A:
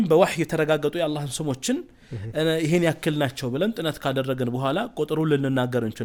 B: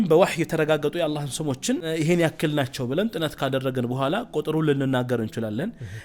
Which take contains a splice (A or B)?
B